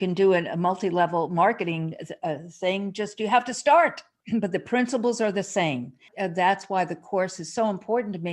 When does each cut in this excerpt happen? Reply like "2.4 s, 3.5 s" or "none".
4.1 s, 6.1 s